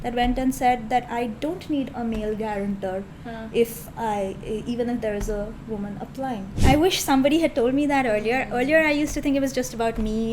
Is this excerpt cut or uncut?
cut